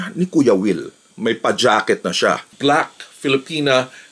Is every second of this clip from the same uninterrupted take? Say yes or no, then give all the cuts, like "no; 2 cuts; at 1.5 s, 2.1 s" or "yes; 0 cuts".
no; 1 cut; at 2.5 s